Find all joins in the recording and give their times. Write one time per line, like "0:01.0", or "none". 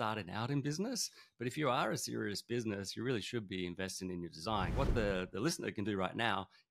0:04.7